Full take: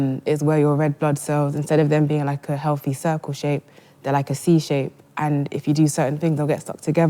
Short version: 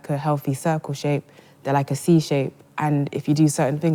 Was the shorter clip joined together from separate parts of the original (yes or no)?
no